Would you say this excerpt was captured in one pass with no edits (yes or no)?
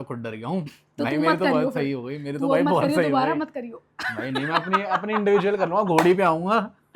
yes